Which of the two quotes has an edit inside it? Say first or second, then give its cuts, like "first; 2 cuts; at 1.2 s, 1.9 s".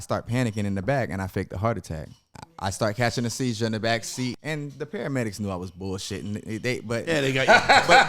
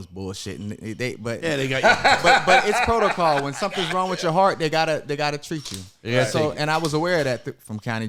first; 2 cuts; at 2.4 s, 4.4 s